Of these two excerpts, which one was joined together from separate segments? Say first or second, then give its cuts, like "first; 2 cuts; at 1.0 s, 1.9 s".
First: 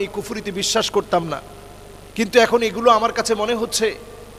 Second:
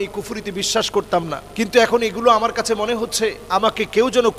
second; 2 cuts; at 1.4 s, 3.4 s